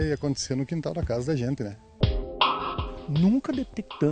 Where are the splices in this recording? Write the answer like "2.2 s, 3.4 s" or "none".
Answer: 1.9 s